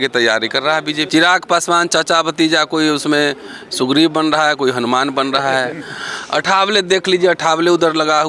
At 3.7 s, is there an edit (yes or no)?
no